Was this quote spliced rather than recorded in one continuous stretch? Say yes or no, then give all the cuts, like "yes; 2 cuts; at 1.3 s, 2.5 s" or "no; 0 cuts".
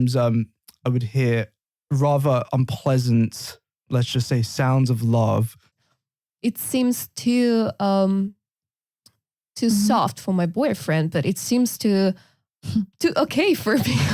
yes; 1 cut; at 5.8 s